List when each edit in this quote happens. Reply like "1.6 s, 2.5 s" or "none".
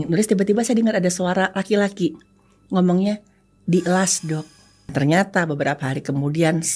4.9 s